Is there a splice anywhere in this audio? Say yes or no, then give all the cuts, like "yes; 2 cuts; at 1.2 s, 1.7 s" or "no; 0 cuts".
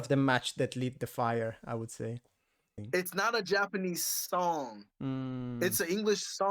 yes; 1 cut; at 2.8 s